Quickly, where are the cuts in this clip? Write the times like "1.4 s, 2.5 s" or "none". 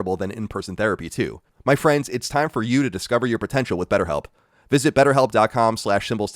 1.5 s